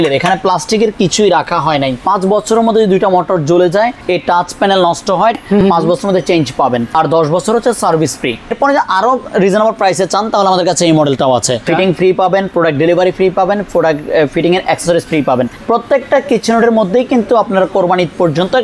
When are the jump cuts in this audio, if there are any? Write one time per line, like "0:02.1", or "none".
0:02.0
0:04.0
0:05.4
0:06.9
0:08.5
0:11.6
0:15.6